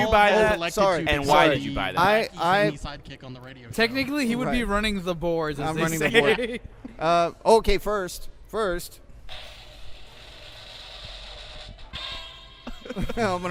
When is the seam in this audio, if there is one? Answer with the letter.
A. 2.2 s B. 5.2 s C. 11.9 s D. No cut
D